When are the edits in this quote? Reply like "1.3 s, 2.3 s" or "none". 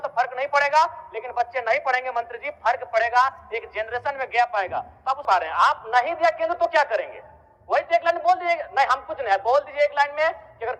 5.2 s